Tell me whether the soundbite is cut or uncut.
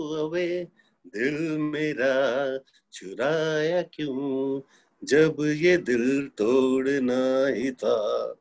uncut